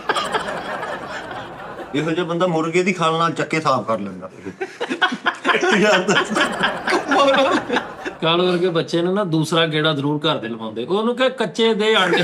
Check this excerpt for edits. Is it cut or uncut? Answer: cut